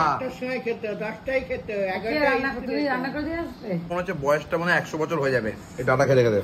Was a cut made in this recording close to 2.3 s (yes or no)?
no